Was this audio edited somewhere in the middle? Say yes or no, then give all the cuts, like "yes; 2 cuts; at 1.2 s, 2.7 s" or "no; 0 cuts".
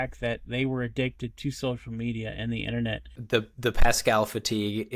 yes; 1 cut; at 3.1 s